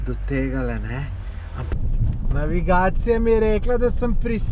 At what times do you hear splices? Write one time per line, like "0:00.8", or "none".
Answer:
0:01.7